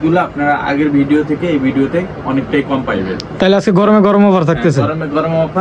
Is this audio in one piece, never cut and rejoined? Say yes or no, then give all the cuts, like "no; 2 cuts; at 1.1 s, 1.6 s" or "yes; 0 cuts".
yes; 0 cuts